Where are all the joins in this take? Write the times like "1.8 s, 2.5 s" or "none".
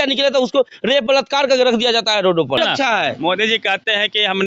2.6 s